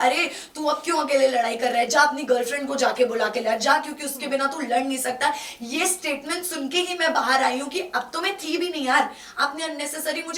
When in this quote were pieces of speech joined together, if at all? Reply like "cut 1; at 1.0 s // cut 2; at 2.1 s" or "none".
none